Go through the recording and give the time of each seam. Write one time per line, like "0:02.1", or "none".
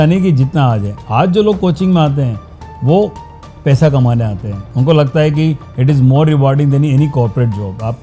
none

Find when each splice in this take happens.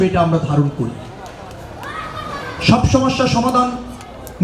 none

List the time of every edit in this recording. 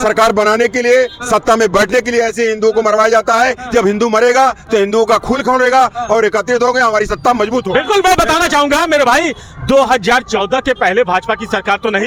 none

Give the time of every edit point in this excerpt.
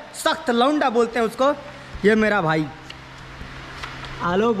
none

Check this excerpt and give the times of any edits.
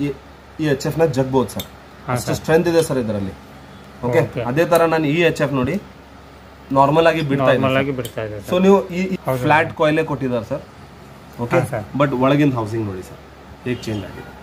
0:09.2

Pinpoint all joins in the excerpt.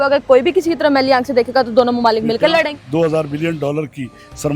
0:02.7

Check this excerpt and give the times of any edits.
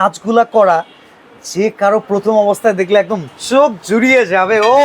none

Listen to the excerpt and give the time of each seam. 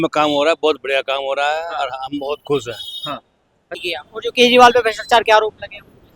0:03.8

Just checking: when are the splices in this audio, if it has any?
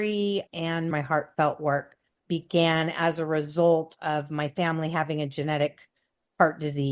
0:00.9

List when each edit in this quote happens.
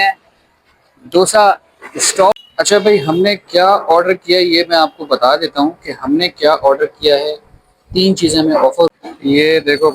0:02.4
0:08.9

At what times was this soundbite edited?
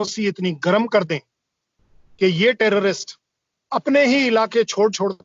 none

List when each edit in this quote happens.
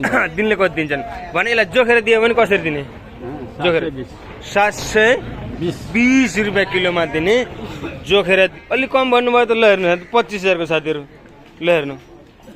0:08.6

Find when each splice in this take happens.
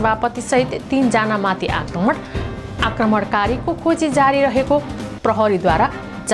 none

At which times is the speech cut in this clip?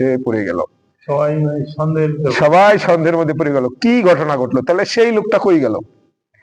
none

